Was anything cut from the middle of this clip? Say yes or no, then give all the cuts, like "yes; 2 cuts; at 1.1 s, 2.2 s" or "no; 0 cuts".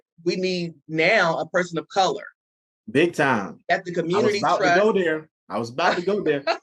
no; 0 cuts